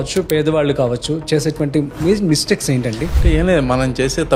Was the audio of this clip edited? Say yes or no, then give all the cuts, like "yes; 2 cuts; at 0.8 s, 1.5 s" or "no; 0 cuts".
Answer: no; 0 cuts